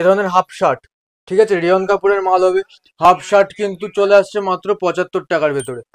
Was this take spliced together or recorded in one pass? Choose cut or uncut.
uncut